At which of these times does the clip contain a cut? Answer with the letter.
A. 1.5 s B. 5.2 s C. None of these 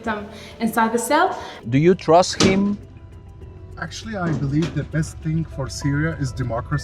A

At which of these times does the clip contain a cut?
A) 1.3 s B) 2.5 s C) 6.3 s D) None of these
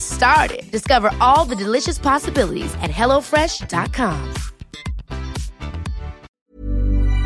C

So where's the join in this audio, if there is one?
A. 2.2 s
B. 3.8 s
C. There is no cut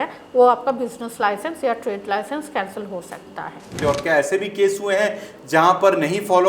B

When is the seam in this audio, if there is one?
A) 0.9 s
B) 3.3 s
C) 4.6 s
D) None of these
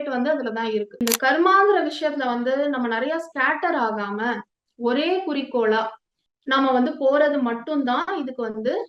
A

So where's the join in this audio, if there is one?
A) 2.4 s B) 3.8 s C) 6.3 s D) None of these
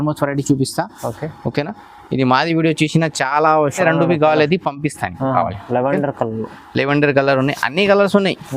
B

